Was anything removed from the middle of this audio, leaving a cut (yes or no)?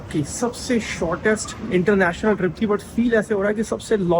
no